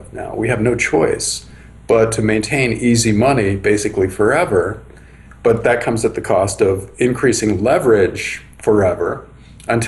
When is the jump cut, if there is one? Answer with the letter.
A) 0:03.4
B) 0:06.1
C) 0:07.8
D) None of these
D